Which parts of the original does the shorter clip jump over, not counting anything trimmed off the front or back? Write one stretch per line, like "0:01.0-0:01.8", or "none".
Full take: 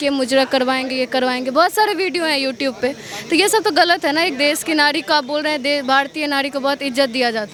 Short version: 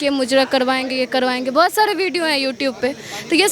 none